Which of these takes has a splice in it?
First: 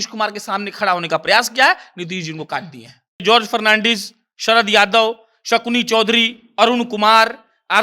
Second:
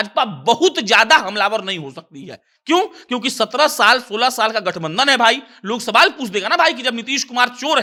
first; 1 cut; at 3.2 s

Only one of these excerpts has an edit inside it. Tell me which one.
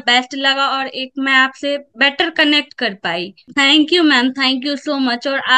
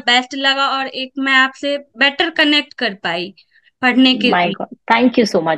first; 1 cut; at 3.4 s

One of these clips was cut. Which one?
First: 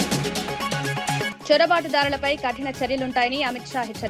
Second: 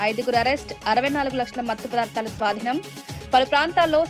first; 1 cut; at 1.2 s

